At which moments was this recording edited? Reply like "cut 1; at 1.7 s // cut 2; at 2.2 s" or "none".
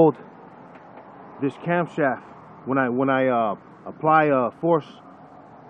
none